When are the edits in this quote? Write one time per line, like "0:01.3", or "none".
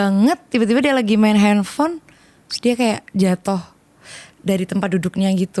none